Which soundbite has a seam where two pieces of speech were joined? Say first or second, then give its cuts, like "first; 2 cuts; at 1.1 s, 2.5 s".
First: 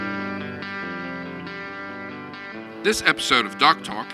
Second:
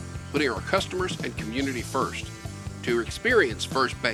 first; 1 cut; at 2.8 s